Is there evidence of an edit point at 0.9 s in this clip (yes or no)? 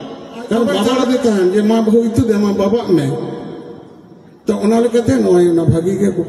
yes